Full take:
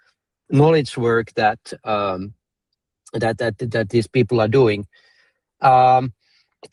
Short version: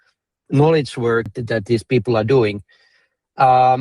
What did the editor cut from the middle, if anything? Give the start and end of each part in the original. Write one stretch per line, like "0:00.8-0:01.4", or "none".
0:01.3-0:03.5